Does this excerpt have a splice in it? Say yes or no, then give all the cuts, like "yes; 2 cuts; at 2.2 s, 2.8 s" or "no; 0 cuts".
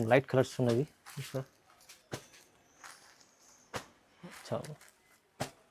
no; 0 cuts